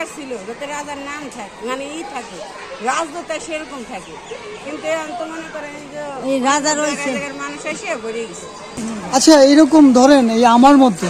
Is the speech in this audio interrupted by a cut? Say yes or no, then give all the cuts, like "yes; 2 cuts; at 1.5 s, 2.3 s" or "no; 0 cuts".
yes; 1 cut; at 8.8 s